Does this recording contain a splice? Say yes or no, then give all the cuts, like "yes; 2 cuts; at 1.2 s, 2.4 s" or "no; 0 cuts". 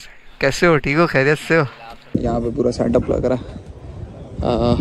yes; 1 cut; at 2.1 s